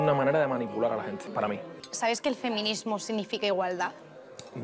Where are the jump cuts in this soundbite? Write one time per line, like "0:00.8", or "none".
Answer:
0:01.9